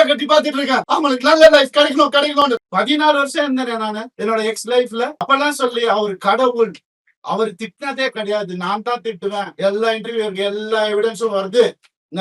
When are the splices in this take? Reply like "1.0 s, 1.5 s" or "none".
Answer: 0.9 s, 2.6 s, 4.1 s, 5.2 s